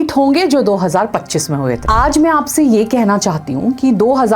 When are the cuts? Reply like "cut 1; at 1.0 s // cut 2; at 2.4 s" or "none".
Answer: cut 1; at 1.8 s